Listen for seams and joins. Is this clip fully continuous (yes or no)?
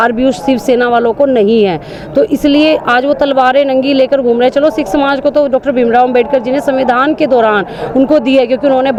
yes